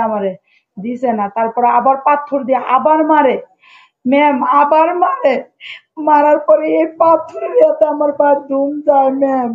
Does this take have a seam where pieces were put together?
no; 0 cuts

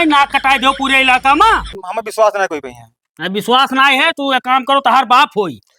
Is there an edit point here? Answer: yes; 1 cut; at 1.7 s

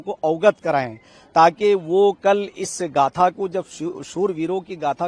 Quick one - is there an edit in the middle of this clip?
no; 0 cuts

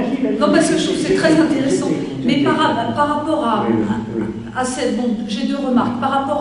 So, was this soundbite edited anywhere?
no; 0 cuts

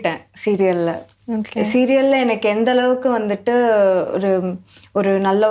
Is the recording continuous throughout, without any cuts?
yes; 0 cuts

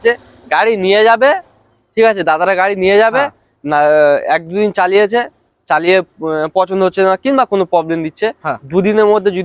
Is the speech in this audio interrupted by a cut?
no; 0 cuts

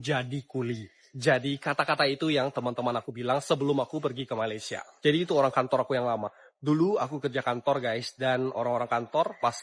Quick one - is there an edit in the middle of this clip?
no; 0 cuts

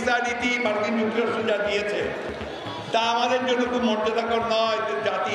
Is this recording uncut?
yes; 0 cuts

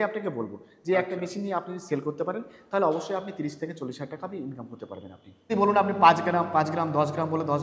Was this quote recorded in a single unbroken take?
no; 1 cut; at 5.5 s

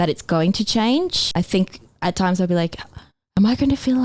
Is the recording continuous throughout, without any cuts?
no; 1 cut; at 1.4 s

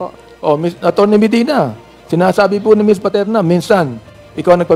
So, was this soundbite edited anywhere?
no; 0 cuts

